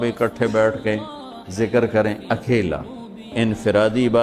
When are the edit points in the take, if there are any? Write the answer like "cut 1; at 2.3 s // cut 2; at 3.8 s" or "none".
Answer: cut 1; at 3.3 s

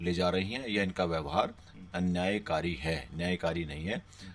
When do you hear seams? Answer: none

